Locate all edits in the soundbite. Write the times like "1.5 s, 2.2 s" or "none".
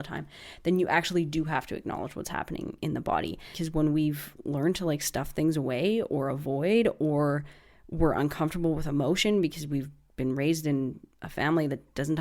3.6 s